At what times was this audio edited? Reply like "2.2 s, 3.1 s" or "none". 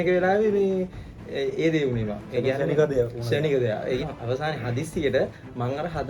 4.1 s